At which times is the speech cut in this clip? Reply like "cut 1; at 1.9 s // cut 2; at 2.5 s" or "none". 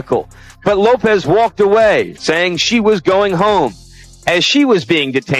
none